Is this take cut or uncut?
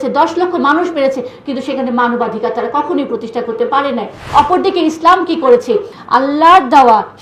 cut